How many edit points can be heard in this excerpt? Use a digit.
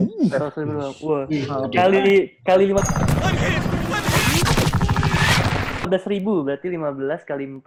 0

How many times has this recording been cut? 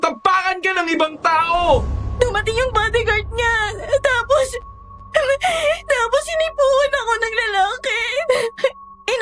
1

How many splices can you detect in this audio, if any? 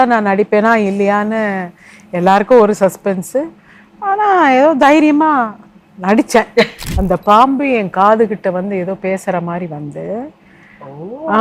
1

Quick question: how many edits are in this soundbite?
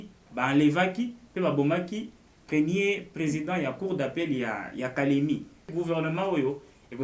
1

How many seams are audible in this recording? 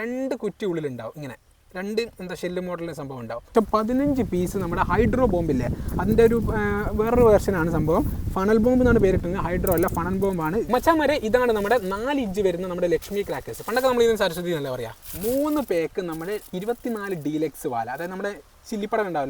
3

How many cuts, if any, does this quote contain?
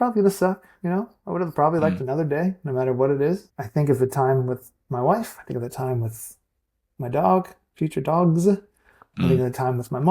1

